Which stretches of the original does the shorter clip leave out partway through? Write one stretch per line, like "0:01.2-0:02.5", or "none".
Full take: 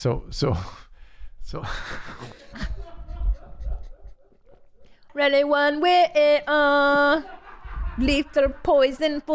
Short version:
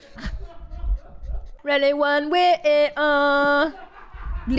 0:03.9-0:05.0